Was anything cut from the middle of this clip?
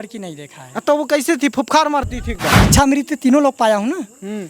yes; 1 cut; at 2.5 s

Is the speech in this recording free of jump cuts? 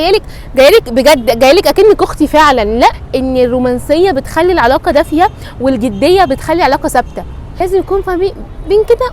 no; 2 cuts; at 3.0 s, 7.4 s

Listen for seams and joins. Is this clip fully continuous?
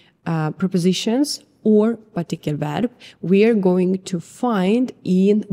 yes; 0 cuts

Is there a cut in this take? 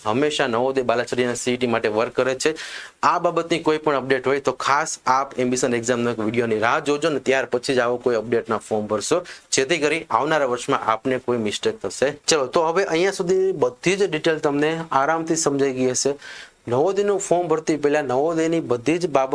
no; 0 cuts

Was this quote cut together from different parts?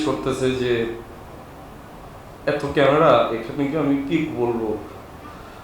no; 0 cuts

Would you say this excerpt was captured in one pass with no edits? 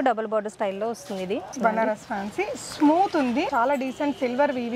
no; 2 cuts; at 1.5 s, 3.5 s

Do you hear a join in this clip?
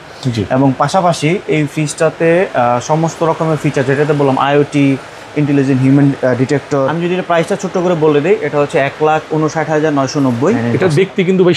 yes; 2 cuts; at 6.9 s, 10.6 s

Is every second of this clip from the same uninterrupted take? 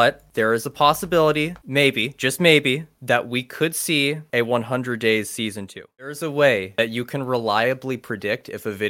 no; 1 cut; at 6.1 s

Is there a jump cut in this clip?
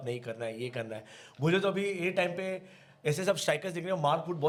no; 0 cuts

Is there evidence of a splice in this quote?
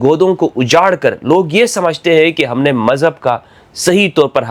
no; 0 cuts

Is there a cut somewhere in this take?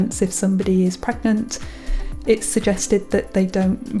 no; 0 cuts

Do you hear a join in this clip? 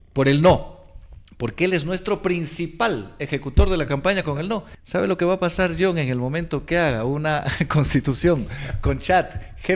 yes; 1 cut; at 4.8 s

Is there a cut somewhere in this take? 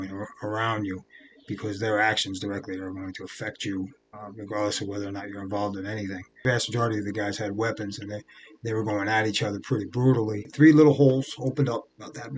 yes; 2 cuts; at 6.4 s, 10.5 s

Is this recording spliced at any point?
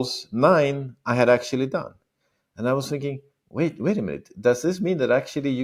no; 0 cuts

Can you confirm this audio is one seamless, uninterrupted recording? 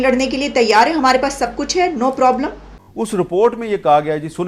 no; 1 cut; at 2.7 s

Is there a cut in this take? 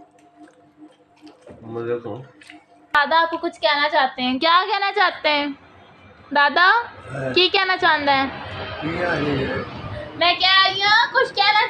yes; 2 cuts; at 3.0 s, 10.1 s

